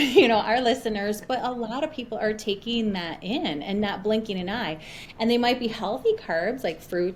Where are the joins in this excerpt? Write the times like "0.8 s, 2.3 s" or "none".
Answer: none